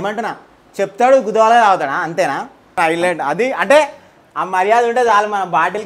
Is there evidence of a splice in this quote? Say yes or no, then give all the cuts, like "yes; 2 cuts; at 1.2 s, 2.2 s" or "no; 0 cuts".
yes; 1 cut; at 2.8 s